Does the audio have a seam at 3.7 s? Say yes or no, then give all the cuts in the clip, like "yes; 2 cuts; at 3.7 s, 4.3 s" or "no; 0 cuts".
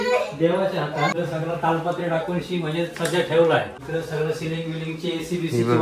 yes; 2 cuts; at 1.1 s, 3.7 s